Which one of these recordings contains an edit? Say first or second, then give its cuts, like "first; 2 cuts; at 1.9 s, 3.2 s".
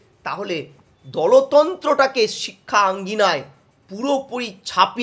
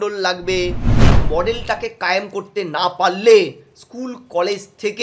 second; 1 cut; at 1.1 s